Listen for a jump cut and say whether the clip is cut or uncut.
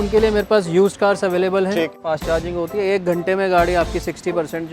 cut